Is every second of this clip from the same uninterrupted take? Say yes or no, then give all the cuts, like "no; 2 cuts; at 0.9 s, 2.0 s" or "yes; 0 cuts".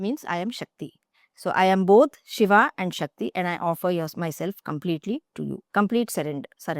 no; 1 cut; at 5.6 s